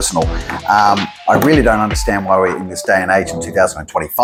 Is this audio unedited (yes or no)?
yes